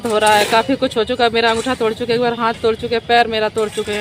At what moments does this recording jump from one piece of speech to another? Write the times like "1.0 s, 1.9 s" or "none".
none